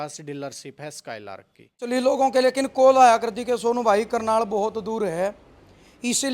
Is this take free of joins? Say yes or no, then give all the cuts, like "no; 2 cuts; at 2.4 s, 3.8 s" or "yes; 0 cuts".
no; 1 cut; at 1.8 s